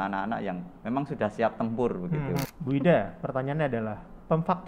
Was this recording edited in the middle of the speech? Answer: yes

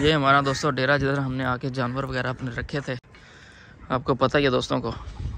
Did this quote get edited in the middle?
no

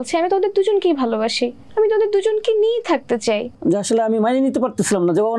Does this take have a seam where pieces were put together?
yes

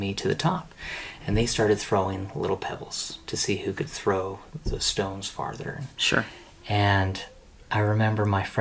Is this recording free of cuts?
yes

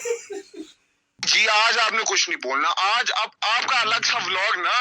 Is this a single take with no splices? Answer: no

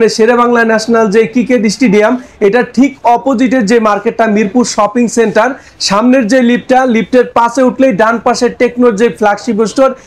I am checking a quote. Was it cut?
no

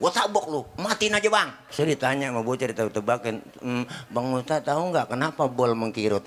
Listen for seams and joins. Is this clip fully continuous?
no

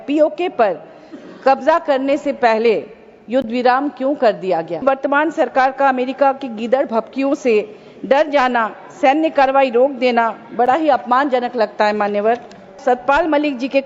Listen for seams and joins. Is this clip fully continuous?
no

